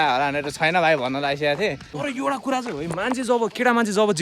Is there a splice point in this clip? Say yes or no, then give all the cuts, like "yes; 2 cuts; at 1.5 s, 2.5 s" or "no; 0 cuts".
yes; 1 cut; at 1.9 s